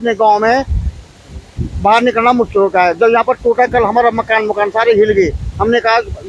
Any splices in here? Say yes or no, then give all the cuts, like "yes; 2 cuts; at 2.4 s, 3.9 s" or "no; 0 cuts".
no; 0 cuts